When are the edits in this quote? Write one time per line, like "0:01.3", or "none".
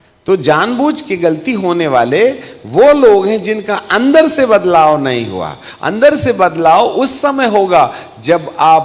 none